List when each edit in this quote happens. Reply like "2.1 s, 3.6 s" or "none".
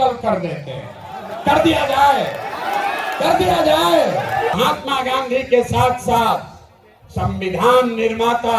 4.5 s